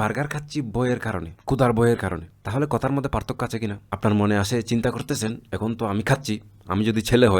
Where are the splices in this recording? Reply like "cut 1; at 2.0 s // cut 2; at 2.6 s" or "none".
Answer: cut 1; at 1.3 s // cut 2; at 2.3 s // cut 3; at 3.8 s